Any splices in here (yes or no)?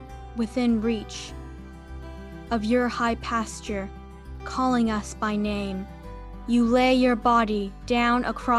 no